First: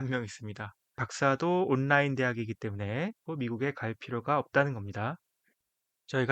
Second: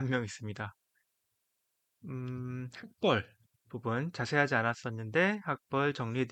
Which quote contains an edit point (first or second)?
first